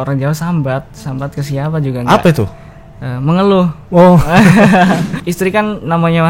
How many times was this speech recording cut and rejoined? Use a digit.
1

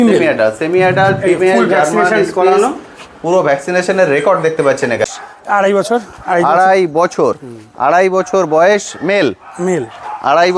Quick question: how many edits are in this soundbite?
1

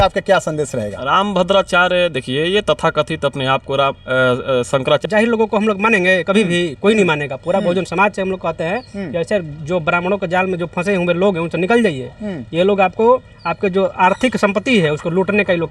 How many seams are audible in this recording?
1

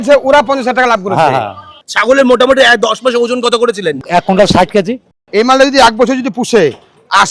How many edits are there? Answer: 3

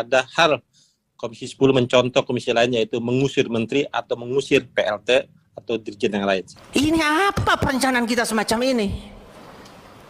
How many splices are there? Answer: 1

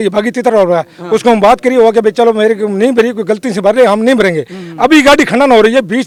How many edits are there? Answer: 0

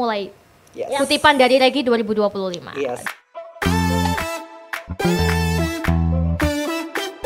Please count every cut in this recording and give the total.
1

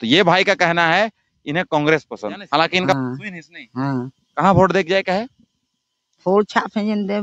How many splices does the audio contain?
1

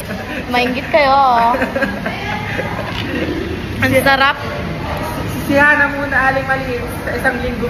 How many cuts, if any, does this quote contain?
0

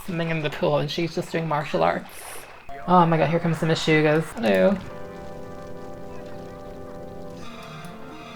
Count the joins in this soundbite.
2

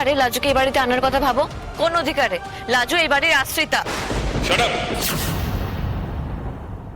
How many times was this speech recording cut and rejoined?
0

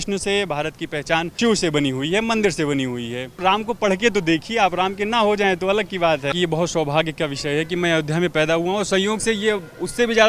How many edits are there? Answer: 3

